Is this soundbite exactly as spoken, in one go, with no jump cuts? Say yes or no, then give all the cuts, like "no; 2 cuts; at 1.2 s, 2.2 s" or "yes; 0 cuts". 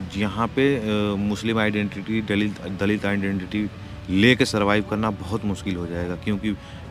yes; 0 cuts